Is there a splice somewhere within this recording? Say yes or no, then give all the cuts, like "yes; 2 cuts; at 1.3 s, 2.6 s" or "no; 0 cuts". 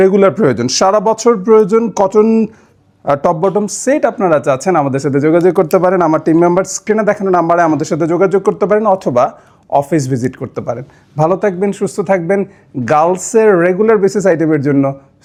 no; 0 cuts